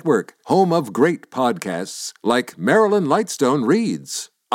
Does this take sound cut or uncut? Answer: uncut